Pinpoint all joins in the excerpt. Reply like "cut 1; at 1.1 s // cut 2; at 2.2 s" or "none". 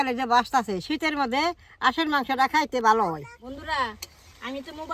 cut 1; at 3.3 s